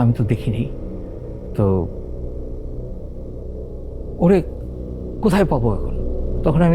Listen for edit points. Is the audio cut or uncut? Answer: uncut